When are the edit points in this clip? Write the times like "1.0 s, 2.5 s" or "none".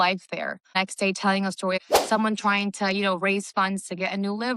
0.7 s, 1.8 s